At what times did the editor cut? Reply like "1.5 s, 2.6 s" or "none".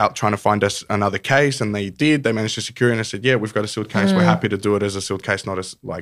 none